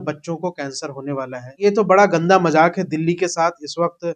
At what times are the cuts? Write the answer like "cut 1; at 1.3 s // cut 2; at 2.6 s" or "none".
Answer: cut 1; at 1.6 s